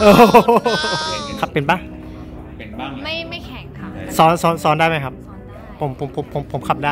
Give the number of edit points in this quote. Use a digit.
1